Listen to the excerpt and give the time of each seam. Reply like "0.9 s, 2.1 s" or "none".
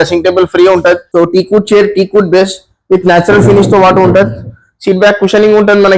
1.1 s